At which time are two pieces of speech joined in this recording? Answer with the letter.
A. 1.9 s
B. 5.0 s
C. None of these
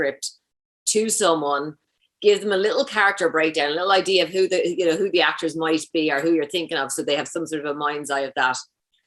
C